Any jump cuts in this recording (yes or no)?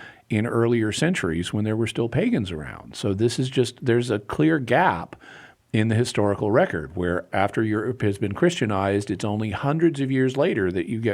yes